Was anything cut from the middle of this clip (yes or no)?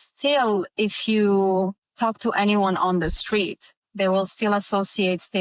no